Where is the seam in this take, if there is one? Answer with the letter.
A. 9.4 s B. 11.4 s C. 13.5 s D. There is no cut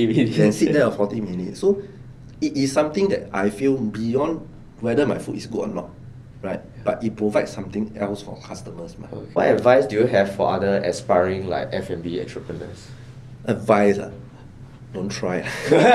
A